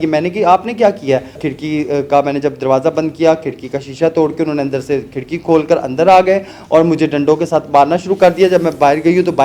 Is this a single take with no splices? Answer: no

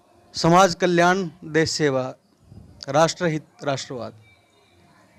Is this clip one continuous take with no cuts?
yes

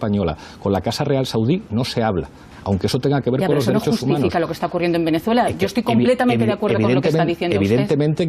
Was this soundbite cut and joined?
no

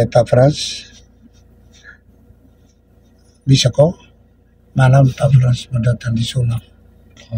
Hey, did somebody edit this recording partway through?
no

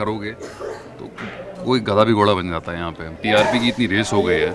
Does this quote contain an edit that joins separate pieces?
yes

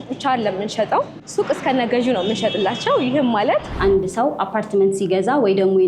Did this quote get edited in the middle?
yes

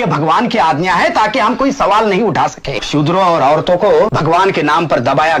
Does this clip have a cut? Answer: yes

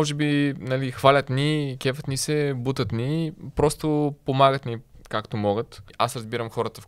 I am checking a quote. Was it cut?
yes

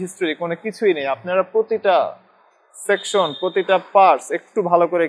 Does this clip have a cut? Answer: no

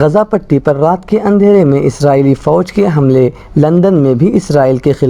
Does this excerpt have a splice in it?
no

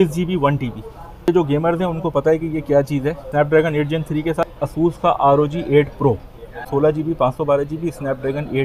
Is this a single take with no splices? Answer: no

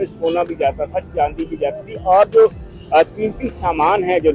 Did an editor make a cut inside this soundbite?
no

